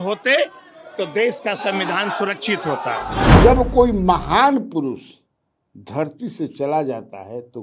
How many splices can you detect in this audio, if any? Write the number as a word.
one